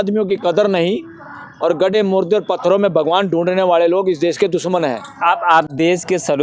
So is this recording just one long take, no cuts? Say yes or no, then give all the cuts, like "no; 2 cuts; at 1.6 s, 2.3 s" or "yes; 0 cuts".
yes; 0 cuts